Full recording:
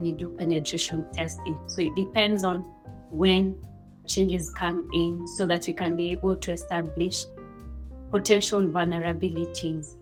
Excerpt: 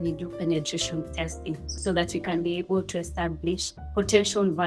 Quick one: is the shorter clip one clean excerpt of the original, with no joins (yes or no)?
no